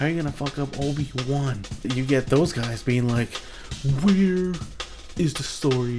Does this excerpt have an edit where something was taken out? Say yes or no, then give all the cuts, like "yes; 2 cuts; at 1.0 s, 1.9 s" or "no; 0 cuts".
yes; 1 cut; at 1.9 s